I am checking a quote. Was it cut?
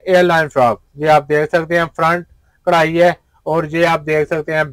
no; 0 cuts

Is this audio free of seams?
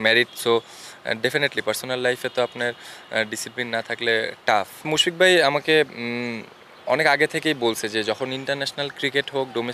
no; 1 cut; at 4.8 s

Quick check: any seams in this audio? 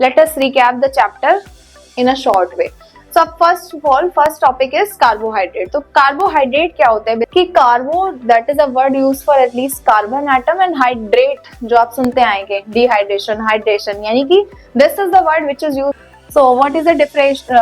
yes; 2 cuts; at 7.3 s, 16.0 s

